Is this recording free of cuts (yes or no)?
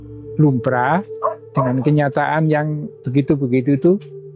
yes